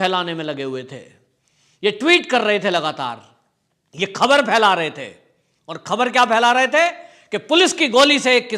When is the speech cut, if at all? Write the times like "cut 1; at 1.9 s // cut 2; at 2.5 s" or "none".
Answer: none